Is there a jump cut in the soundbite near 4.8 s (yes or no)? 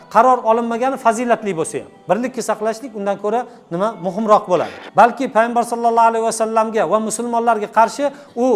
yes